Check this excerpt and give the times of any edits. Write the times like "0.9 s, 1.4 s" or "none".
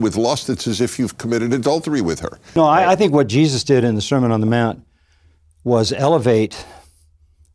2.6 s